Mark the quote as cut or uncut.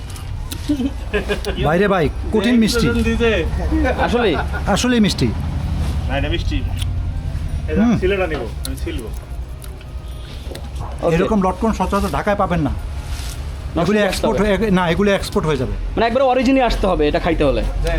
uncut